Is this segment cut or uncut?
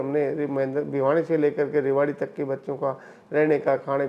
uncut